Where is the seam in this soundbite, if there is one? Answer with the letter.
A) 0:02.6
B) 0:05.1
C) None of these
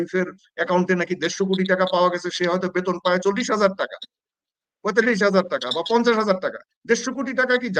C